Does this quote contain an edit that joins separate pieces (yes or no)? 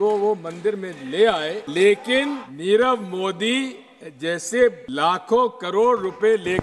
yes